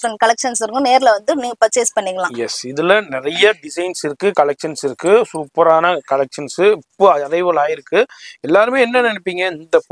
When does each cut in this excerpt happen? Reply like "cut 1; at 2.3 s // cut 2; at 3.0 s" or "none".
none